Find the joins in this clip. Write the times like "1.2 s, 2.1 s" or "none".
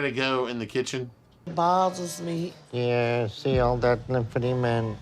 1.3 s